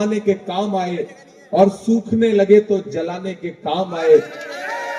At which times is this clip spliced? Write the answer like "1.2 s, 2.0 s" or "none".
none